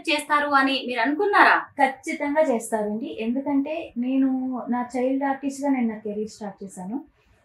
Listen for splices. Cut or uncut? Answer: uncut